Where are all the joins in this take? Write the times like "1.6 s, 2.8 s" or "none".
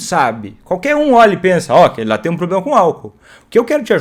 none